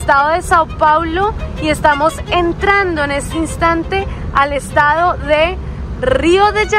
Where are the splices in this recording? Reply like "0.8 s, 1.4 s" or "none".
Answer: none